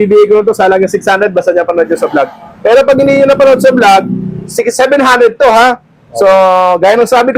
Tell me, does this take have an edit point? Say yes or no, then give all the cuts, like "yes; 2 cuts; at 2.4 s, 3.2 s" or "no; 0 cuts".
no; 0 cuts